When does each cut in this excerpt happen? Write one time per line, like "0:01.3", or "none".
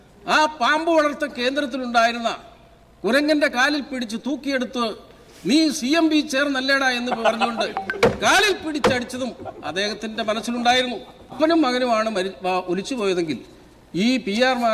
0:11.4